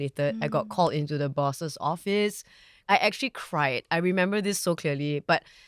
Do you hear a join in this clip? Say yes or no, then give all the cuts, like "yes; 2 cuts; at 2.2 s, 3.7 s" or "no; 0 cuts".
no; 0 cuts